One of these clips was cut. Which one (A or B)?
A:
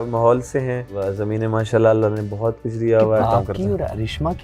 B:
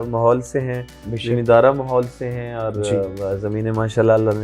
A